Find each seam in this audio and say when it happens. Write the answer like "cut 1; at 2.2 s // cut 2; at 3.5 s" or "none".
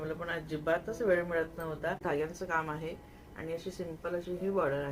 cut 1; at 2.0 s